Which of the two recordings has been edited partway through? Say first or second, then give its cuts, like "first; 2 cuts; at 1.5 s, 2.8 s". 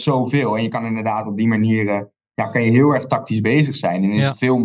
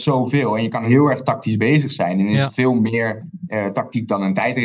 second; 2 cuts; at 0.9 s, 3.4 s